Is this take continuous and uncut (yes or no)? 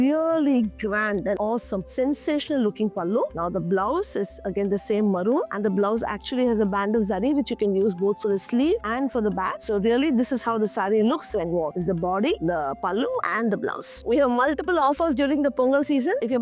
yes